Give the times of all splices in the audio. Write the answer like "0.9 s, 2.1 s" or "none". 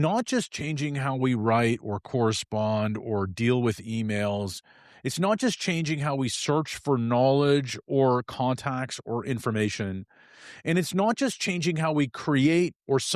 none